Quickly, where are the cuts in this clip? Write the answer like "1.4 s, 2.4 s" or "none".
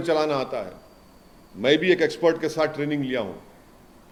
none